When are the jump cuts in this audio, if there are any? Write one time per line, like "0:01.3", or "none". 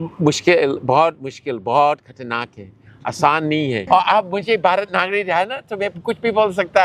0:03.8

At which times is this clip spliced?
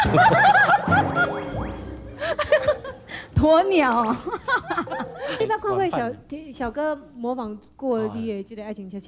0:05.4

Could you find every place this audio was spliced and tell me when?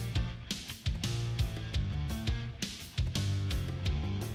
none

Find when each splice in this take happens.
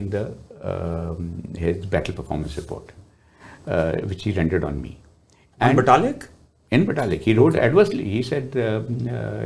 none

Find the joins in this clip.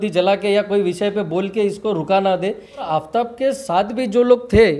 0:02.8

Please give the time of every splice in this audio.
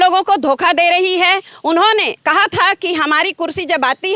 none

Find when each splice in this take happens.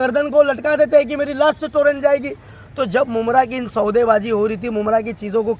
none

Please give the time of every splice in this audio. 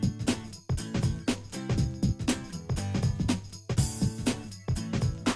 0:01.7
0:03.6

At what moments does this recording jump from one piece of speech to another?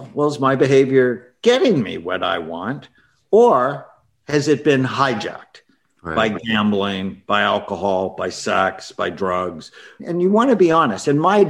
none

